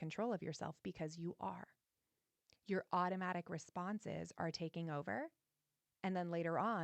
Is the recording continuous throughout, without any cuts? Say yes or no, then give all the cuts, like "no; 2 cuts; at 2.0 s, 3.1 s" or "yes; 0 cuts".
yes; 0 cuts